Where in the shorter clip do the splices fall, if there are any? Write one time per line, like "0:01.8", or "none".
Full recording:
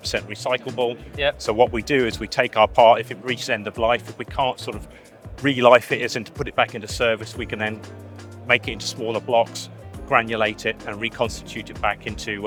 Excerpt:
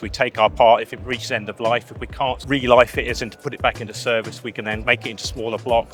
0:02.4
0:04.8